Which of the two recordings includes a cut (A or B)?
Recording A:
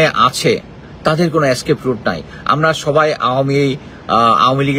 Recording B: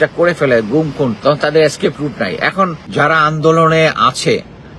B